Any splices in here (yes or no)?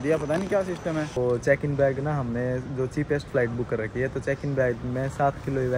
yes